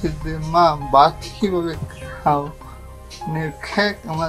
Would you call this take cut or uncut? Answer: uncut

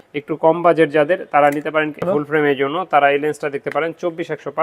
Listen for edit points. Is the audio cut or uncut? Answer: cut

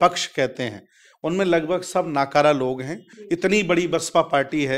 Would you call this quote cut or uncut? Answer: cut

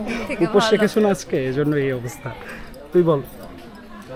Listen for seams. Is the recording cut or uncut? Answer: uncut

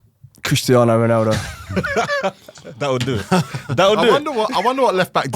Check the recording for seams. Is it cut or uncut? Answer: uncut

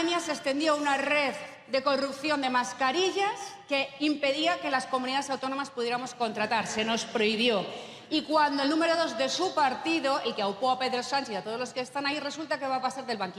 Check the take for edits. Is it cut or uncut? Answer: uncut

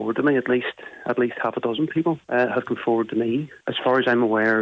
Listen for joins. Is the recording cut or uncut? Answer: cut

